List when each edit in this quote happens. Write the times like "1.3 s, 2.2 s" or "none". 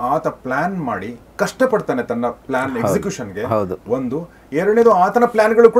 none

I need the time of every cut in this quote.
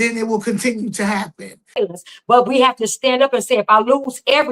1.7 s

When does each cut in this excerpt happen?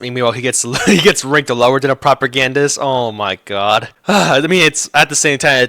3.9 s

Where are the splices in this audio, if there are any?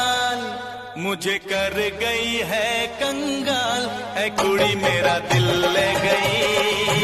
none

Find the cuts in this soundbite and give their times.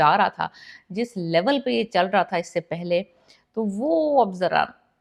none

